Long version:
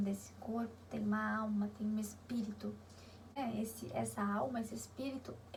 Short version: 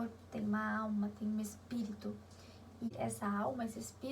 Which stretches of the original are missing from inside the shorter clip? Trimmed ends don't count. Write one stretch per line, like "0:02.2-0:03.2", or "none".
0:03.3-0:03.7